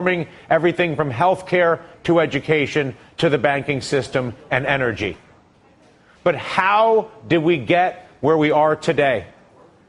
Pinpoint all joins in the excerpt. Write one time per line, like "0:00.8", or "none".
0:00.9